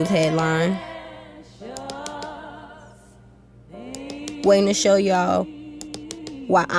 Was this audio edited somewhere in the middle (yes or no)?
yes